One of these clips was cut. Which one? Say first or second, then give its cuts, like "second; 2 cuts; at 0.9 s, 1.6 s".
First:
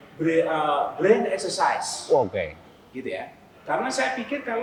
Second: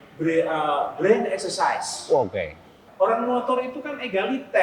second; 1 cut; at 2.8 s